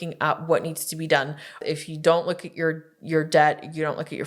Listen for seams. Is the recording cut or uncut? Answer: cut